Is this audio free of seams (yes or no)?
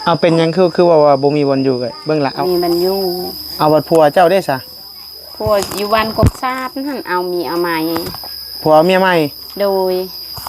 no